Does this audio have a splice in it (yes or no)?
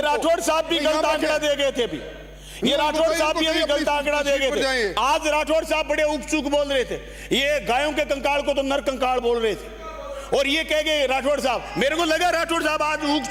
no